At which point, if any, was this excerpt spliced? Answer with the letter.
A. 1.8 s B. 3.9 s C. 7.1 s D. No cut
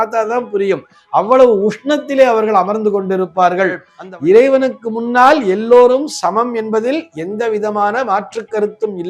B